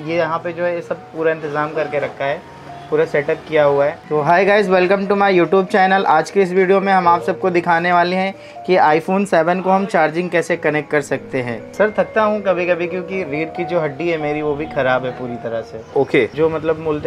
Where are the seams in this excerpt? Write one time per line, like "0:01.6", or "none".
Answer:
0:04.0
0:11.6
0:16.3